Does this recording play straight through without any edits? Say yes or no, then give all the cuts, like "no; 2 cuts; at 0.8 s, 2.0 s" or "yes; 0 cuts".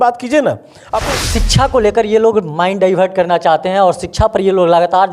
no; 1 cut; at 1.0 s